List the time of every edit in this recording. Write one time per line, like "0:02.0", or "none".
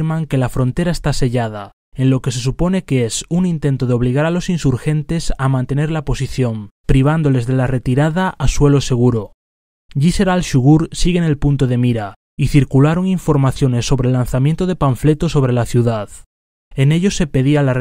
0:08.4